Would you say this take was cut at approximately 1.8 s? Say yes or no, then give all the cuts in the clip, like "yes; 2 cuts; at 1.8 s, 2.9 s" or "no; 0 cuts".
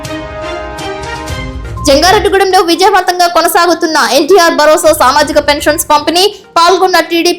yes; 1 cut; at 1.8 s